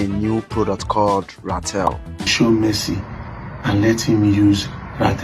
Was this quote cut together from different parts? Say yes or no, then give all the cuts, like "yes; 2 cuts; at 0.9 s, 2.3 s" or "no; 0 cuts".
yes; 1 cut; at 2.3 s